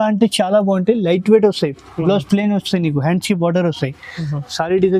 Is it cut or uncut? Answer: uncut